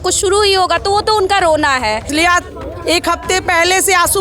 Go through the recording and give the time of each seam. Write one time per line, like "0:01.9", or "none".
0:02.1